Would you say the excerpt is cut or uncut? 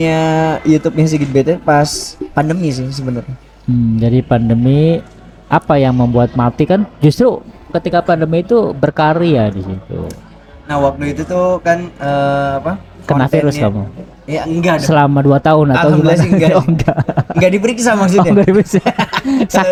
uncut